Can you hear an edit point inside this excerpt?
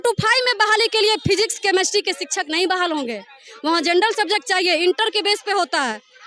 no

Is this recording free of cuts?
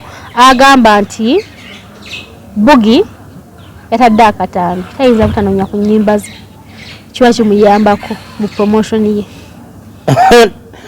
yes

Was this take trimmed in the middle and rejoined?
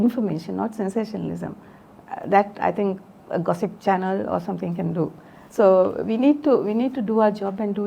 no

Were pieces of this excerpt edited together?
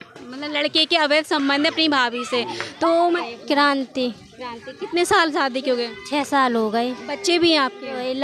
yes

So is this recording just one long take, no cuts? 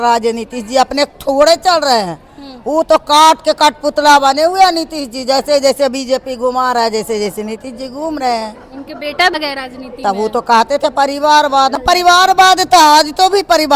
no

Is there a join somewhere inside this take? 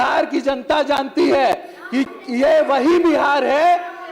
no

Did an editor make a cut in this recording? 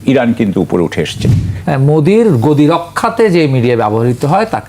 yes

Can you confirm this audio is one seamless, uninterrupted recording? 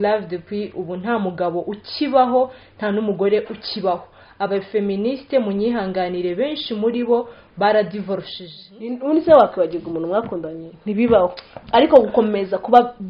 no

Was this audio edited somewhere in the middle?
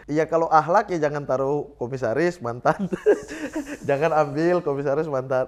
no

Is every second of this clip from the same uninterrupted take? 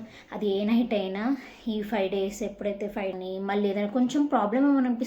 no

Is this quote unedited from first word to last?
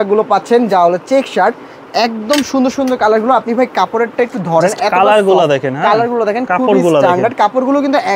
yes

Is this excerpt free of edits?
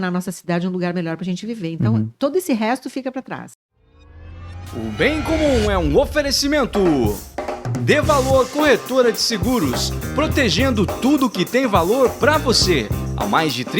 no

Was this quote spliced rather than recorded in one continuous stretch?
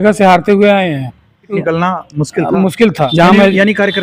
yes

